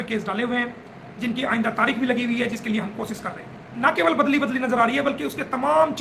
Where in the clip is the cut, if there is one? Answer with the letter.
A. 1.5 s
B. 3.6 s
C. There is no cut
B